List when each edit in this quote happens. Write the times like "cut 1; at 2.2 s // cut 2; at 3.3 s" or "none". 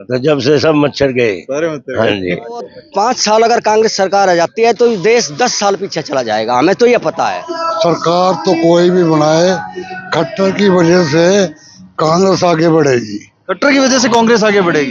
cut 1; at 2.8 s // cut 2; at 7.4 s